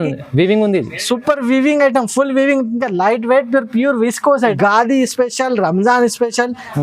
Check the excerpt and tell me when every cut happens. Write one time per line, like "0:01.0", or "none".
0:04.6